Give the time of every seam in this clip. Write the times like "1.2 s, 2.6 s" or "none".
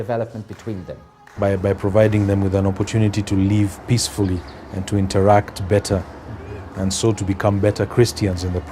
1.4 s